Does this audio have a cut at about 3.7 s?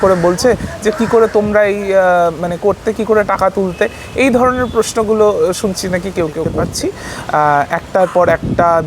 no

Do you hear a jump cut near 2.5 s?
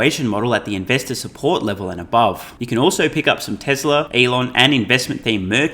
yes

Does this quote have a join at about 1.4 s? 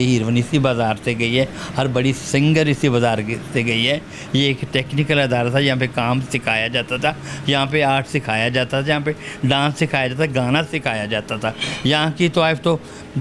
no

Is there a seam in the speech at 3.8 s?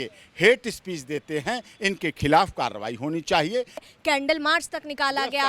yes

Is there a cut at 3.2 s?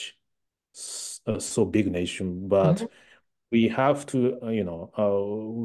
no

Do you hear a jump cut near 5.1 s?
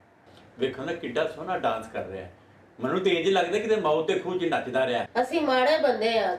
yes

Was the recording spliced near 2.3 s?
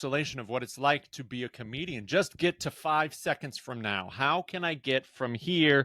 no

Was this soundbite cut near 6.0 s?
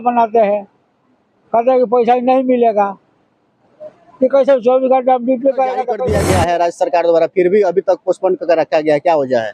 yes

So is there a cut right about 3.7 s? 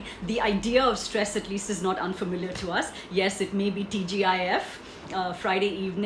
no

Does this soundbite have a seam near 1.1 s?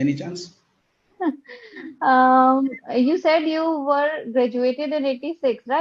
yes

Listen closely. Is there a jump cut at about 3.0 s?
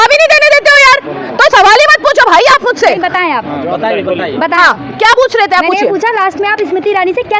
no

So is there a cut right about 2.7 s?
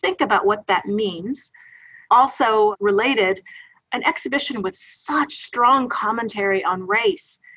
yes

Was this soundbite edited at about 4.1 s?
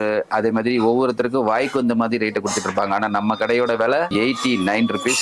yes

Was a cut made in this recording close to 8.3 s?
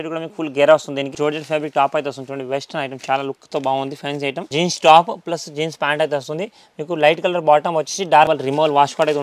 yes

